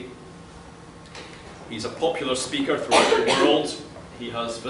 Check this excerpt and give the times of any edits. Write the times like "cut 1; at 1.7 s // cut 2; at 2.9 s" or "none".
cut 1; at 2.5 s

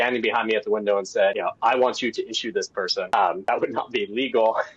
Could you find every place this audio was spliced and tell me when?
cut 1; at 1.4 s // cut 2; at 3.3 s

